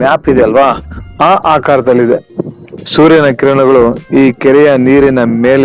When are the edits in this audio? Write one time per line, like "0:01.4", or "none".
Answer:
0:02.2